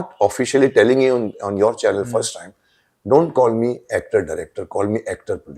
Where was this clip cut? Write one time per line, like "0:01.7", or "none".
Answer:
none